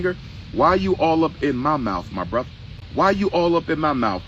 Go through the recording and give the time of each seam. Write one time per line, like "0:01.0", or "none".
0:02.8